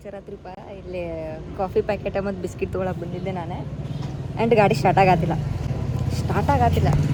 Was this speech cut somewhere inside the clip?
no; 0 cuts

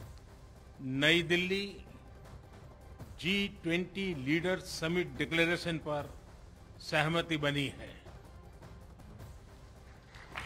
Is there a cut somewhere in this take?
yes; 3 cuts; at 0.7 s, 1.8 s, 3.2 s

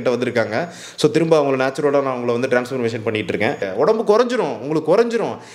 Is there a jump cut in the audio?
yes; 1 cut; at 3.6 s

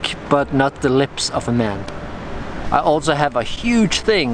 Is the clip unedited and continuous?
no; 1 cut; at 2.5 s

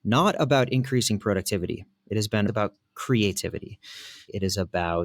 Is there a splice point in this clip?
yes; 2 cuts; at 2.5 s, 4.3 s

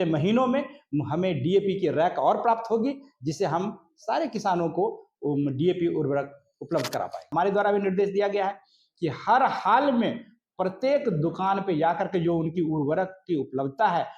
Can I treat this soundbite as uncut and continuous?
no; 1 cut; at 7.2 s

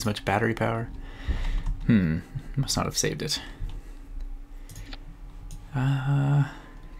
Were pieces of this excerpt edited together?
yes; 1 cut; at 6.0 s

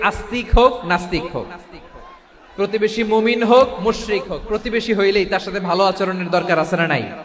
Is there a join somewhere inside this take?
no; 0 cuts

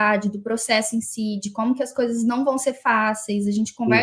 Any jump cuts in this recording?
no; 0 cuts

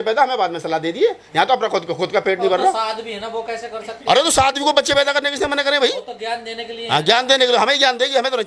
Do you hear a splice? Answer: no; 0 cuts

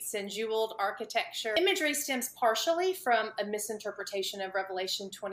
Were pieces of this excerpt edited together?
yes; 1 cut; at 1.5 s

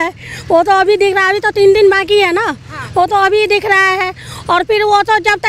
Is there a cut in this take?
no; 0 cuts

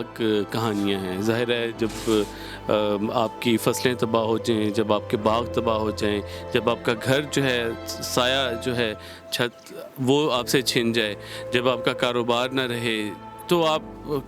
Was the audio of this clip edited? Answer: no; 0 cuts

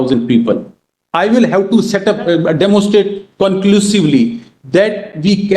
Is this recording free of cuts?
yes; 0 cuts

